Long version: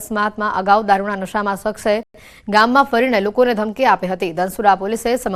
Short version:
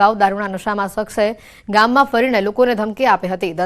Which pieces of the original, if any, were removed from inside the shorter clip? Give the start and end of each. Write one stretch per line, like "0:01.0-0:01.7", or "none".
0:02.2-0:02.3